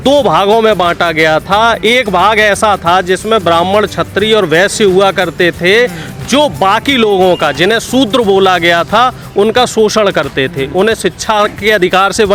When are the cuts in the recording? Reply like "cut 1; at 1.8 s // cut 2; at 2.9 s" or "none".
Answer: none